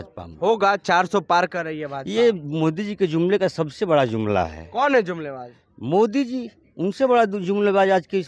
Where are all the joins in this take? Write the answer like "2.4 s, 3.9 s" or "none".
none